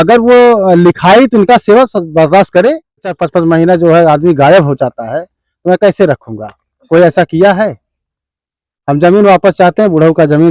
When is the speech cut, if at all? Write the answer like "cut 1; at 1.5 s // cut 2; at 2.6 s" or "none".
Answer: cut 1; at 3.1 s